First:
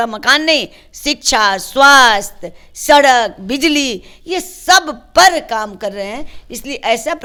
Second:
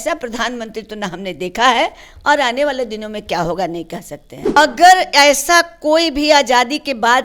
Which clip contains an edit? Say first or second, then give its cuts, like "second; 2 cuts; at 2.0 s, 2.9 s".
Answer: second; 1 cut; at 4.5 s